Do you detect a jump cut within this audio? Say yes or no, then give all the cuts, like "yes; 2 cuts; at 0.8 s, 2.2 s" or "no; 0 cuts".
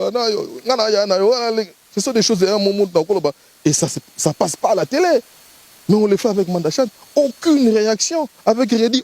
no; 0 cuts